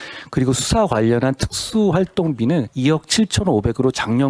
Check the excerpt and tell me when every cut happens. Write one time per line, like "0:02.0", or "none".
0:02.7